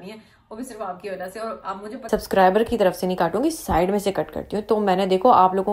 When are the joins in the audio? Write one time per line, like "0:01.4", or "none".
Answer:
0:01.9

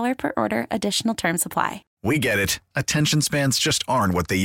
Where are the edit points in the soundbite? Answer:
0:01.9

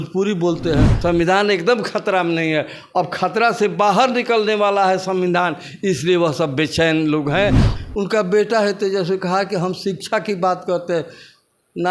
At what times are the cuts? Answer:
0:00.9
0:07.7

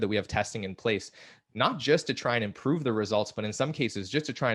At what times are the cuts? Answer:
none

